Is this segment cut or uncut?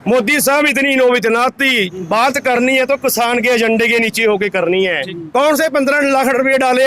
cut